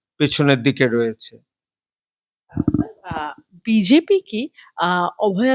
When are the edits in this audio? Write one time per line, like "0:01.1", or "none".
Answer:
none